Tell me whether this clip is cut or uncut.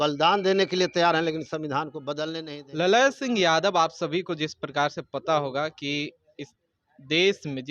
cut